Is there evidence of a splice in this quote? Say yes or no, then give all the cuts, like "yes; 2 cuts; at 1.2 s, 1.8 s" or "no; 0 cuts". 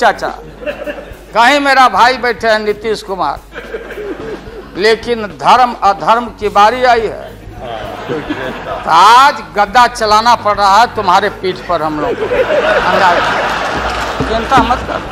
no; 0 cuts